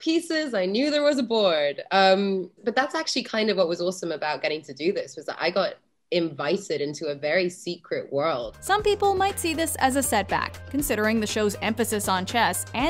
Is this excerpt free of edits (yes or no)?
yes